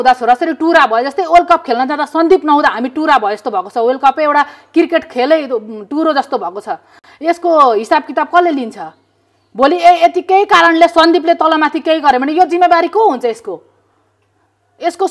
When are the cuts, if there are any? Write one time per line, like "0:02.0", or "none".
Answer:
none